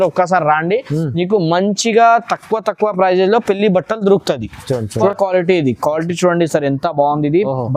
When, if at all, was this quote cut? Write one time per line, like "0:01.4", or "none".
0:05.1